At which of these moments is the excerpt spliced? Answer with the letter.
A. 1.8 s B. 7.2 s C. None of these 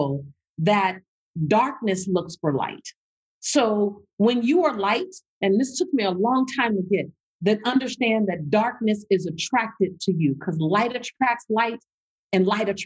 B